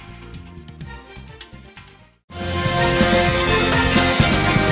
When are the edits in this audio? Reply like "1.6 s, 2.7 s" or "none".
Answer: 3.6 s